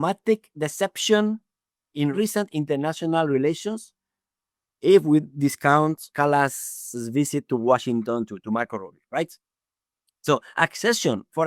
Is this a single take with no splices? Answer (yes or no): no